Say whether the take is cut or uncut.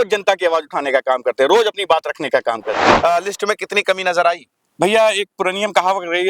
cut